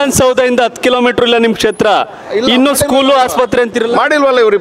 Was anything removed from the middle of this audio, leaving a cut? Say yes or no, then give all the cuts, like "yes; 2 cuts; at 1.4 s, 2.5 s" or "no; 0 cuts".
no; 0 cuts